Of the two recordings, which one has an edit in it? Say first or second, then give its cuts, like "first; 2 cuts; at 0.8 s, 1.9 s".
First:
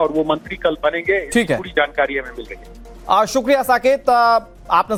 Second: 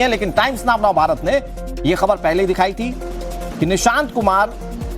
second; 1 cut; at 1.2 s